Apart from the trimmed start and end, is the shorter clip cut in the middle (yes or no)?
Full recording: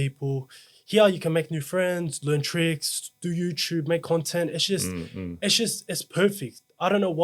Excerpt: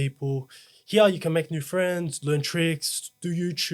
no